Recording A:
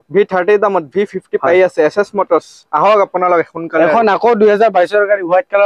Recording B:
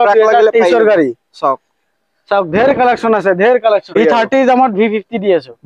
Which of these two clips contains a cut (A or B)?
B